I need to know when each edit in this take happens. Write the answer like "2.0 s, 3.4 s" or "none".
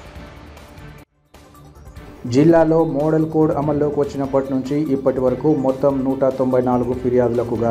2.0 s